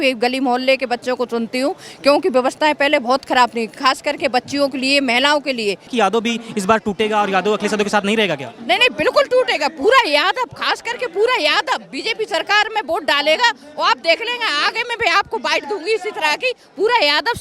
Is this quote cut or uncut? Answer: cut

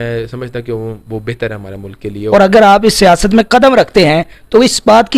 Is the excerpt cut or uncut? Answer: cut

